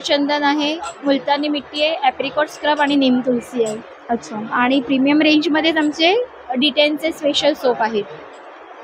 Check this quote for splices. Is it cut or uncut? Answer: uncut